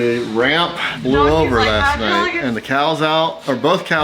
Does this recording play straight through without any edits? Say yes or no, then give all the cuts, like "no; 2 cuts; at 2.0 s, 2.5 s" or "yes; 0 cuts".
no; 2 cuts; at 0.9 s, 2.4 s